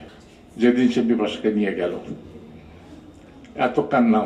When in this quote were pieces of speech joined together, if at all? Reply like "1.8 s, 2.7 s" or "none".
none